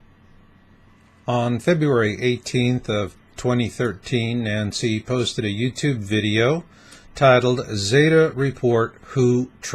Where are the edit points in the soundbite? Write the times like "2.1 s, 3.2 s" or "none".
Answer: 1.4 s